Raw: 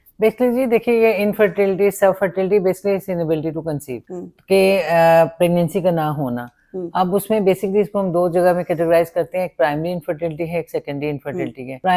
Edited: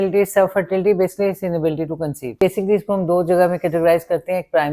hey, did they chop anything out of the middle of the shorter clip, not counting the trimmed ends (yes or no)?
yes